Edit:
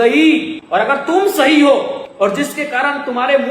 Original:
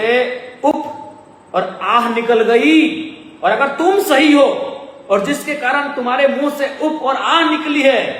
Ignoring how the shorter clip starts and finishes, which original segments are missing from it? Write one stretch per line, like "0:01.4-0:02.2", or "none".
0:03.5-0:03.7
0:04.8-0:05.0